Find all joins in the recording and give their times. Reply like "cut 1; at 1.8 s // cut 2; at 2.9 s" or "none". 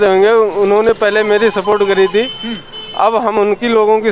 none